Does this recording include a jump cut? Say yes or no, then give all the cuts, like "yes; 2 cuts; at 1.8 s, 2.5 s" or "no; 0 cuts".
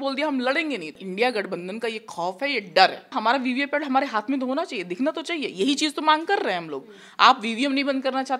yes; 2 cuts; at 1.0 s, 3.2 s